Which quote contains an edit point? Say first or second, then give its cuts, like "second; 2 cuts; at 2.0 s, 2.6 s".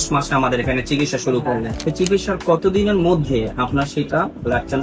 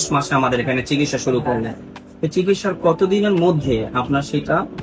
first; 1 cut; at 1.7 s